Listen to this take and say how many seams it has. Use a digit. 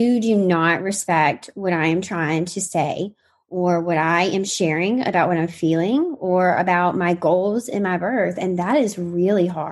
0